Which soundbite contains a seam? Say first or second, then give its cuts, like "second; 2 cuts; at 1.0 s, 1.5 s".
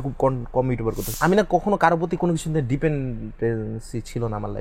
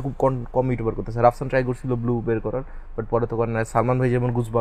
first; 1 cut; at 1.1 s